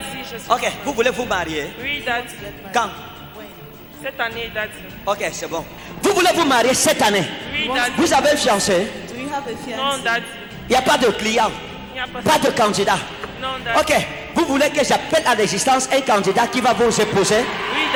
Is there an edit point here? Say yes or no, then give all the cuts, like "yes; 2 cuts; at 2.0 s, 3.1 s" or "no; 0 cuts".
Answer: no; 0 cuts